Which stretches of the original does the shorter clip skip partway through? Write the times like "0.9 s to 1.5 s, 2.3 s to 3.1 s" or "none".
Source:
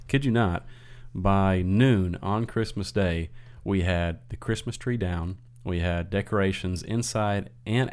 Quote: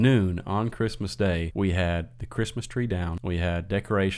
3.2 s to 3.6 s, 5.3 s to 5.6 s